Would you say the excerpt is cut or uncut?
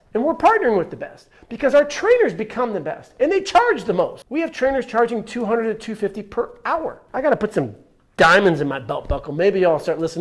cut